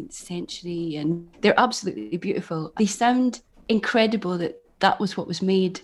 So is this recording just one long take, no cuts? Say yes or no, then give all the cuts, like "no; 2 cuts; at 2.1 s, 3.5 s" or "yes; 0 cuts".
no; 3 cuts; at 1.3 s, 2.6 s, 3.5 s